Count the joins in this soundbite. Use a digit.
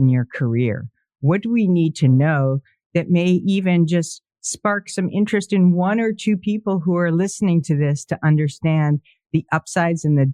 0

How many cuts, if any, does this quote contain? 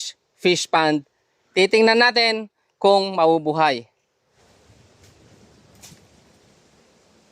1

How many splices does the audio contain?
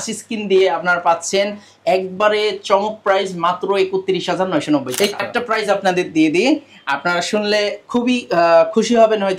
1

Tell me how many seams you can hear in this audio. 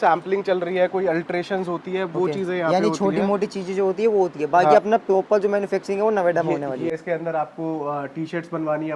1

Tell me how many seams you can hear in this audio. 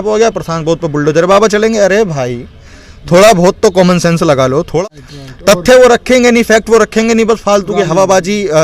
1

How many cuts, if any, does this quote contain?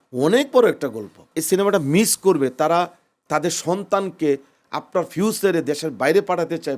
1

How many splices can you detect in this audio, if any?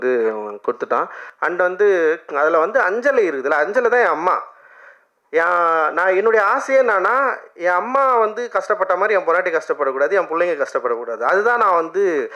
1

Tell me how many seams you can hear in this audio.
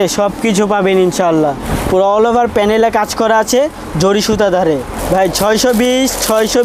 2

